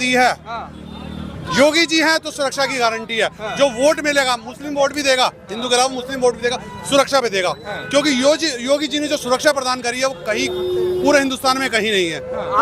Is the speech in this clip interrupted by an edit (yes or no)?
no